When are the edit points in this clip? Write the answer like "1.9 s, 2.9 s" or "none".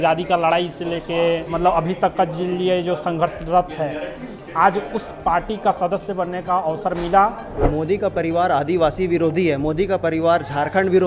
1.4 s, 7.5 s